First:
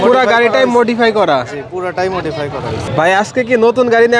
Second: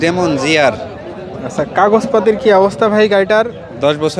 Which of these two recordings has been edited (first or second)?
first